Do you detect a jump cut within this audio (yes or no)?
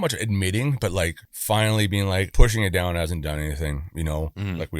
yes